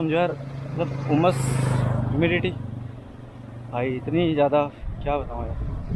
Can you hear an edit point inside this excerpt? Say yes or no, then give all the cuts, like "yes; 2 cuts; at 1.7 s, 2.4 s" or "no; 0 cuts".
no; 0 cuts